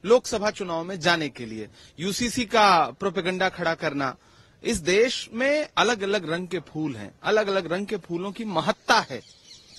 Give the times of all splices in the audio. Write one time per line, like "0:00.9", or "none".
none

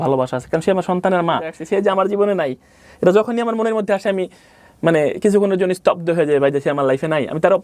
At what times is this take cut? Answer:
0:01.6

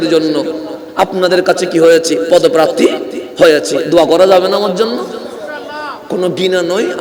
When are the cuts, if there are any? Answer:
none

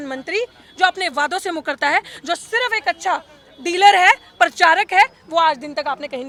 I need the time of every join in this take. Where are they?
none

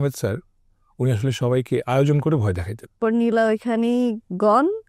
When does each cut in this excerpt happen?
0:03.0

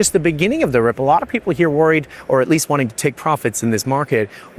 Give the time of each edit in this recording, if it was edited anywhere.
0:02.1

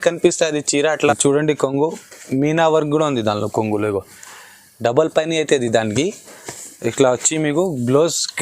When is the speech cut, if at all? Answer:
0:01.1

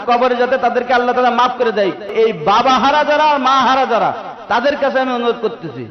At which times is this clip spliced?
0:02.1

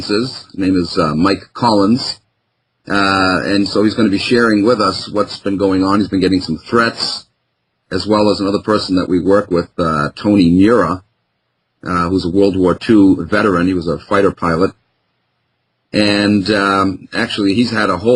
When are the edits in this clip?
0:08.3

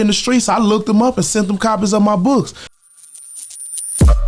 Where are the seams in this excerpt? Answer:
0:02.8

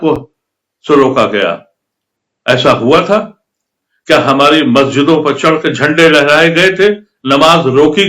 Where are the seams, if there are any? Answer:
none

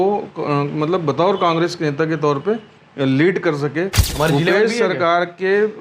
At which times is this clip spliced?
0:04.0

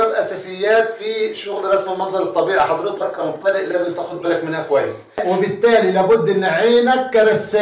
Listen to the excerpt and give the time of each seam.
0:05.2

